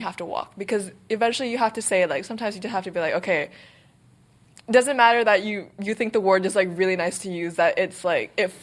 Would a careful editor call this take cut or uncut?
uncut